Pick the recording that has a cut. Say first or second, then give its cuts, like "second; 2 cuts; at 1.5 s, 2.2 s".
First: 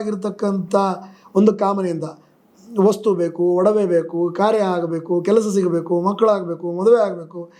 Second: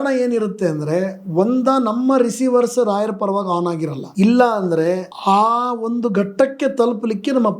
second; 2 cuts; at 4.0 s, 5.1 s